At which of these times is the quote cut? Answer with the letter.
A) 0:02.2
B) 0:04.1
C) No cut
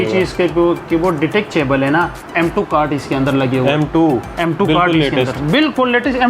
A